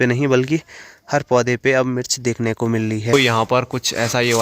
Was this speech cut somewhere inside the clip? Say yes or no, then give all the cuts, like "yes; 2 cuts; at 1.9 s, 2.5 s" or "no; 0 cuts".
yes; 1 cut; at 3.1 s